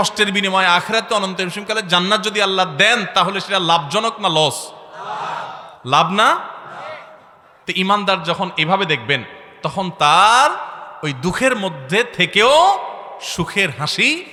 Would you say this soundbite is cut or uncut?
uncut